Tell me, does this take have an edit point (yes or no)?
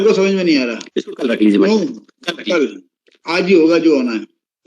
no